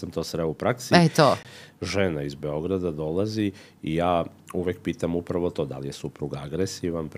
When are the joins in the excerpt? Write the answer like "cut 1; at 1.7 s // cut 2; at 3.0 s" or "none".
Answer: cut 1; at 1.5 s